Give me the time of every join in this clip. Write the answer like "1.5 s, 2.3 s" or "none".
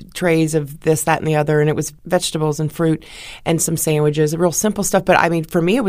none